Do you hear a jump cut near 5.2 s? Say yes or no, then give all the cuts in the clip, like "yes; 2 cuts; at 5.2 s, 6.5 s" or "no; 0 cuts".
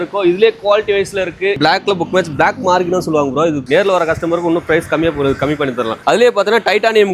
no; 2 cuts; at 1.6 s, 3.6 s